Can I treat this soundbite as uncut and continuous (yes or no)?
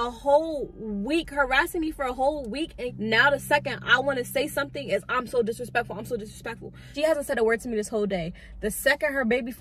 no